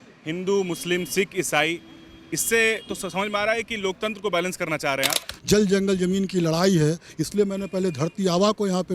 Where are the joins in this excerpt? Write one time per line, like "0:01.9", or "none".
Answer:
0:05.3